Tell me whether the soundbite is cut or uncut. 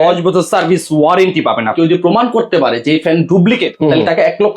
cut